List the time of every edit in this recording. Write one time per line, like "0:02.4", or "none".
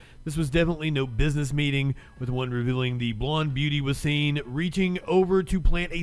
none